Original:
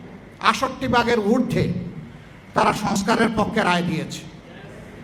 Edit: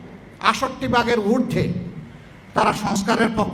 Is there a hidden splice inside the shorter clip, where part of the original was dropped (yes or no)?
no